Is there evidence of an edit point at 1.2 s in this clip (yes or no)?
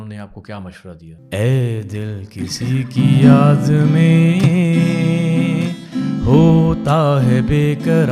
yes